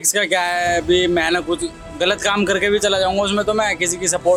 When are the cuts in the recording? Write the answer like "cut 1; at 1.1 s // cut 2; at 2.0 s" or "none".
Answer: none